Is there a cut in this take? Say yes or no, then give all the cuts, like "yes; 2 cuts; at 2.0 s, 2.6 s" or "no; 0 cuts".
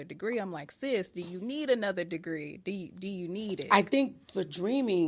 yes; 1 cut; at 3.6 s